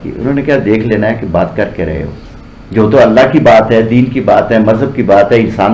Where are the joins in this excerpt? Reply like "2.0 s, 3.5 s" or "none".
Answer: none